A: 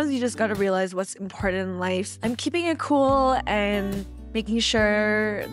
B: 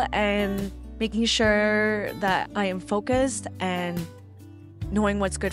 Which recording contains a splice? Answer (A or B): A